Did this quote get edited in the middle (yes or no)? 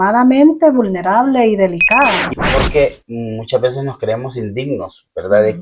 yes